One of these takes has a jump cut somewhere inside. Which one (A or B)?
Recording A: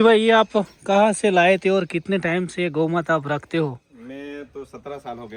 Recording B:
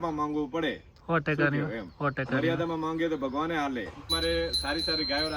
B